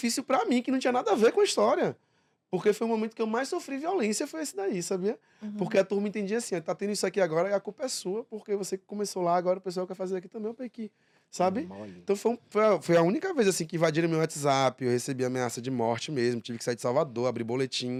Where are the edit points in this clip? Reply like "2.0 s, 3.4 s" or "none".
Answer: none